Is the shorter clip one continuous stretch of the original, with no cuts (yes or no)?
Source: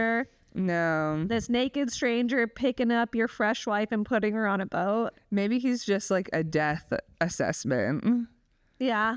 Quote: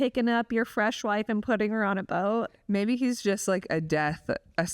yes